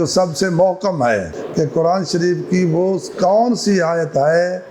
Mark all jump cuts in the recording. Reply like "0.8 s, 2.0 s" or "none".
1.4 s